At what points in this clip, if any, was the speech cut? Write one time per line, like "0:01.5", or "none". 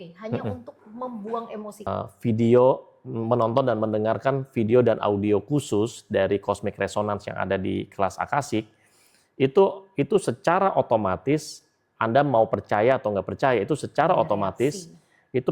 0:01.9